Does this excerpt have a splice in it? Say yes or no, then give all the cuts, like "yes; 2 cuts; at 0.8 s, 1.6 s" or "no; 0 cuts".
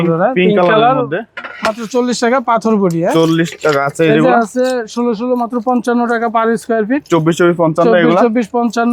no; 0 cuts